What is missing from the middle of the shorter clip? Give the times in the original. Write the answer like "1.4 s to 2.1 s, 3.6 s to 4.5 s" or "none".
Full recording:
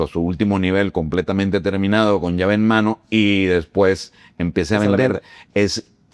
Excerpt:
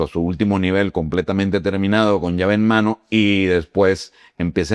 none